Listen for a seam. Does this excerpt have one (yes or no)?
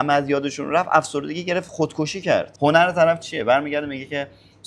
yes